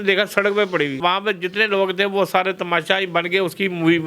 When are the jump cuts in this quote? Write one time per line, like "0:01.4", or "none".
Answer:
0:01.0